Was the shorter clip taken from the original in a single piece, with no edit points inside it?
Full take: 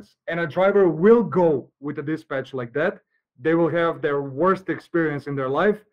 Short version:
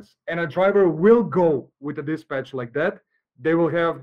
yes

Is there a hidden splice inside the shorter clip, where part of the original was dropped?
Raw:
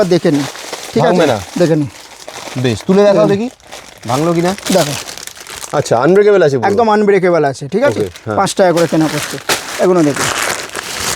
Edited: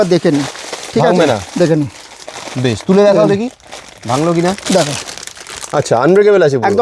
no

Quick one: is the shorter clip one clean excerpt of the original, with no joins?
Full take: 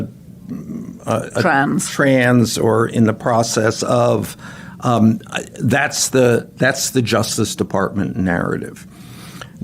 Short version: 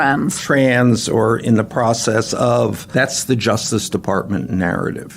no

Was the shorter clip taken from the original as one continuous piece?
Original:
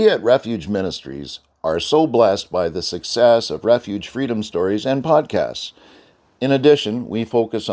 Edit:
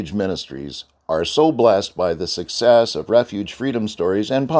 yes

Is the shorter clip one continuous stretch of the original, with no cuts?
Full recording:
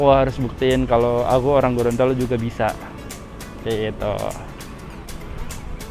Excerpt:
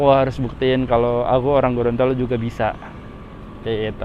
yes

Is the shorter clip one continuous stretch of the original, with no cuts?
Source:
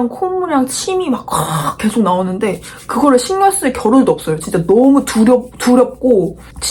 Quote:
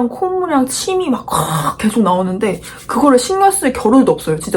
yes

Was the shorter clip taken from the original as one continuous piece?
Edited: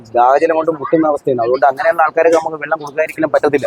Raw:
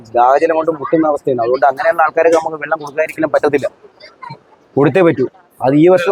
yes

